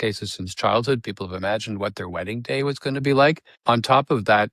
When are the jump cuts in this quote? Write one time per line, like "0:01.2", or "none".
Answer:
0:03.5